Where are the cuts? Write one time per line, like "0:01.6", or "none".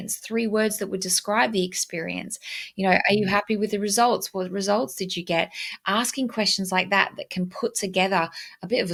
none

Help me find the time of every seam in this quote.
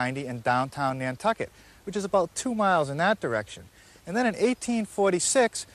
0:01.4

